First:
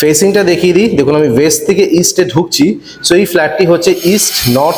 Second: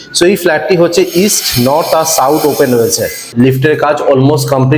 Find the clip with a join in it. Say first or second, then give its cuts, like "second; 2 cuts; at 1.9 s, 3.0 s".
second; 1 cut; at 3.2 s